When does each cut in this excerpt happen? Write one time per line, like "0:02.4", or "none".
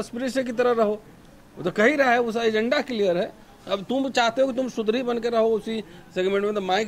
none